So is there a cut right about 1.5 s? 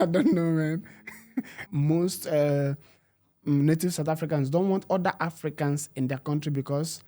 yes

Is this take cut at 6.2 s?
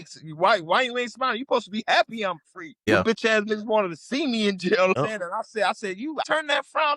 yes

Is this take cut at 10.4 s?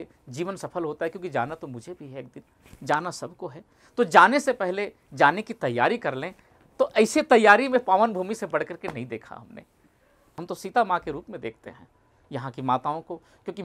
yes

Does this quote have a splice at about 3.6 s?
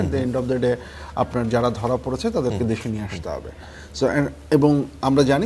no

